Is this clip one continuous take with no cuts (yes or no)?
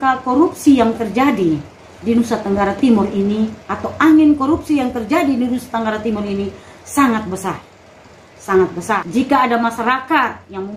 no